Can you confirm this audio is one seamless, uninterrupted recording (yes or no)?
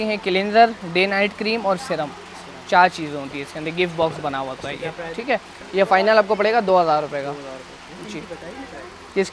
yes